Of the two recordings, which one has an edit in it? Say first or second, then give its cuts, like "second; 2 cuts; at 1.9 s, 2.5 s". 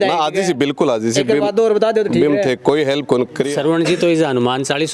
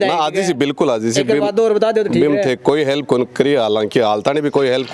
first; 1 cut; at 3.5 s